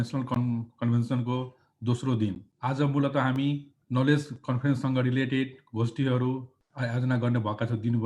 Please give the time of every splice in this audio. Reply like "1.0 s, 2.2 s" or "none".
2.5 s, 3.7 s, 6.6 s

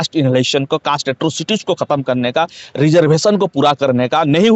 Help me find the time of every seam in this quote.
none

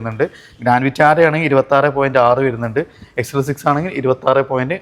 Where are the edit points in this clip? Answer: none

